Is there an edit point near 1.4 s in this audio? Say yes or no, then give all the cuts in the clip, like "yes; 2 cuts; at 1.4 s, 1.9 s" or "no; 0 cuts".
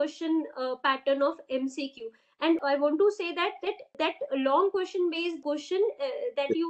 no; 3 cuts; at 2.6 s, 4.0 s, 5.4 s